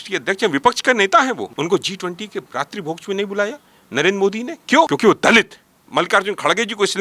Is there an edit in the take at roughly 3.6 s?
no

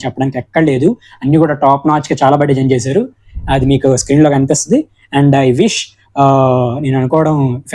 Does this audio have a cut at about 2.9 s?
no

